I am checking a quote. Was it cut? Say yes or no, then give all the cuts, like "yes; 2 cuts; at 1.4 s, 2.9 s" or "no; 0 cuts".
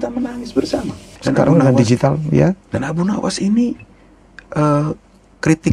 yes; 1 cut; at 1.1 s